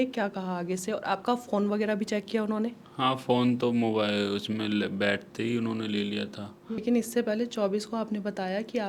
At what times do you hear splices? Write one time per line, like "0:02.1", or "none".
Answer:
0:06.8